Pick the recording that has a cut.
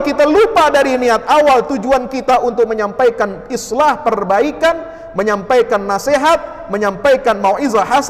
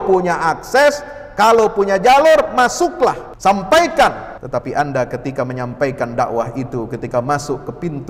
second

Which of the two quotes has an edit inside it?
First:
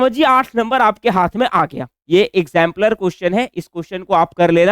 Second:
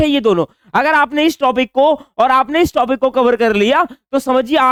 first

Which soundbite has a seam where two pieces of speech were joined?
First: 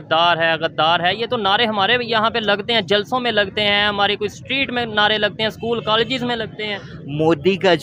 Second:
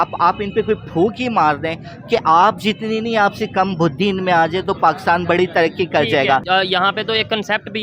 second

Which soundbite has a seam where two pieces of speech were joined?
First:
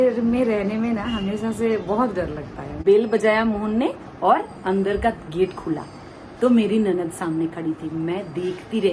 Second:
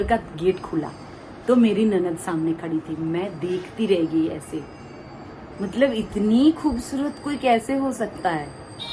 first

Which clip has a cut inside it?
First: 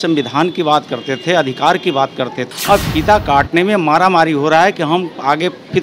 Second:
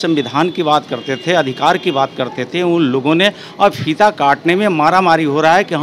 first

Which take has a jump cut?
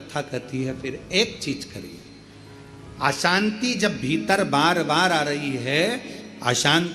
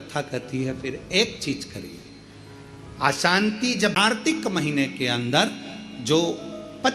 second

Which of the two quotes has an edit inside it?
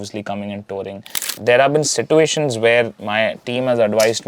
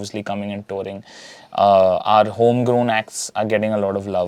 first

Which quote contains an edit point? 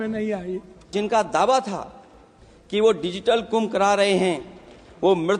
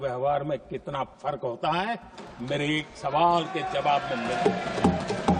first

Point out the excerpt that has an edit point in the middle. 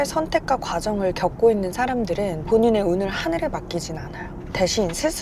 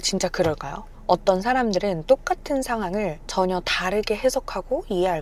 first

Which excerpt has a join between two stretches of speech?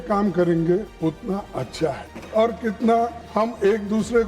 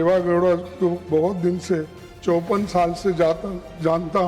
first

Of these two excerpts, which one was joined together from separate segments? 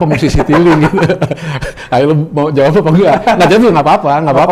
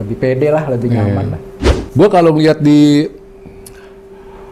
second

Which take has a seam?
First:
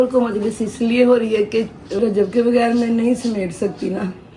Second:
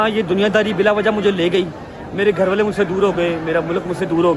first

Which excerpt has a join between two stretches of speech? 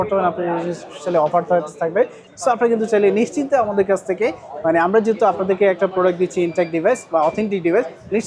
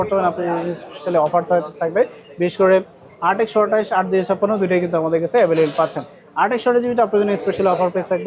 first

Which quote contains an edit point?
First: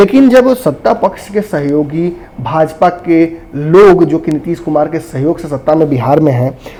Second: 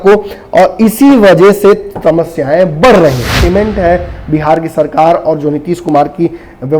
second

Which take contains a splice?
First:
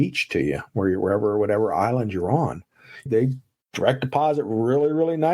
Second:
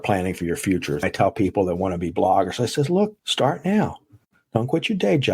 second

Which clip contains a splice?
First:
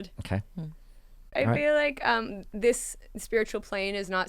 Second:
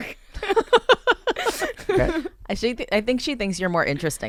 first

